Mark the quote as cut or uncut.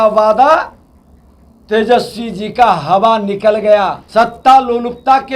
cut